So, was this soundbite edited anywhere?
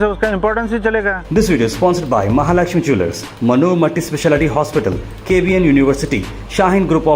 yes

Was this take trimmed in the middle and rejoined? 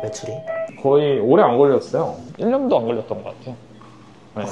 no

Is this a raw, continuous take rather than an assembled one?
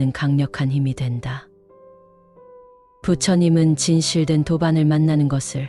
no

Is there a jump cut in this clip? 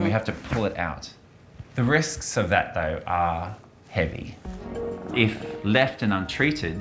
yes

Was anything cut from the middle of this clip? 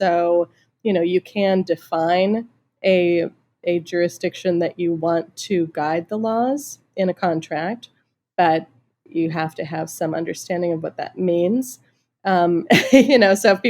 no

